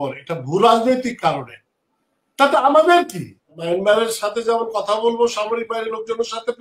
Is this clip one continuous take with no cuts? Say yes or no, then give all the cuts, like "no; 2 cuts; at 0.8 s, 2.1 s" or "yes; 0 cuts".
no; 1 cut; at 3.6 s